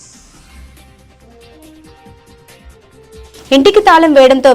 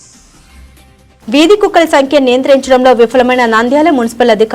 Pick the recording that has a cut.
second; 1 cut; at 1.1 s

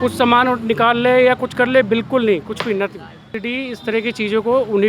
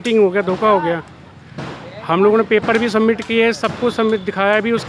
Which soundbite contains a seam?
first; 1 cut; at 3.4 s

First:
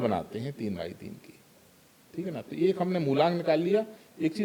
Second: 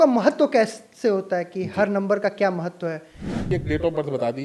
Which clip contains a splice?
second; 1 cut; at 3.5 s

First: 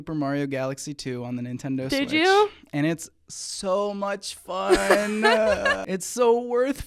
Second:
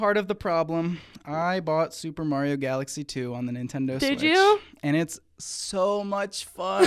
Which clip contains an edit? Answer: first; 1 cut; at 5.8 s

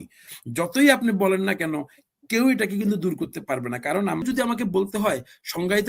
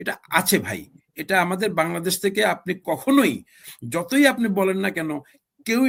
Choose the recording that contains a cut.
first; 1 cut; at 4.2 s

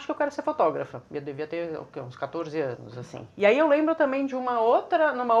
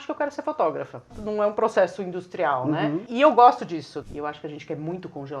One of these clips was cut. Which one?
second; 2 cuts; at 1.1 s, 4.0 s

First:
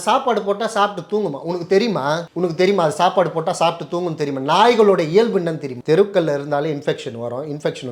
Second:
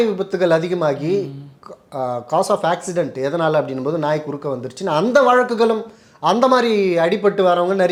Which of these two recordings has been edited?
first; 2 cuts; at 2.3 s, 5.7 s

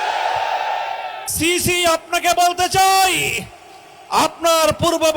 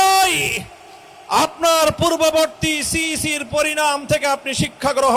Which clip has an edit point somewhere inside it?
first; 1 cut; at 1.2 s

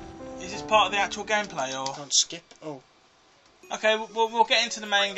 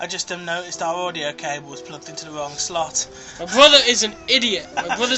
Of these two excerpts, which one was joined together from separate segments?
first; 1 cut; at 2.8 s

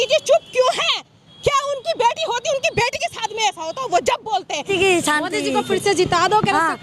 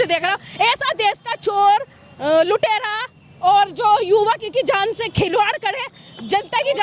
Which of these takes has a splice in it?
first; 1 cut; at 4.6 s

